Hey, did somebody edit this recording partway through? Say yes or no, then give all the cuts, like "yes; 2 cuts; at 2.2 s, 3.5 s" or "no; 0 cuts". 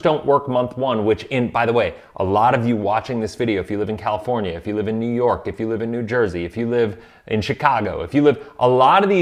no; 0 cuts